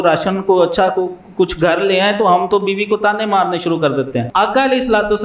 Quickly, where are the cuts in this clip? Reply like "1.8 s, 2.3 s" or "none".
4.3 s